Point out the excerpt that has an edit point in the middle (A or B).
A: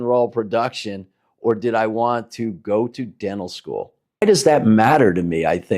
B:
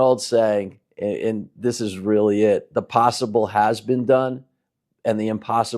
A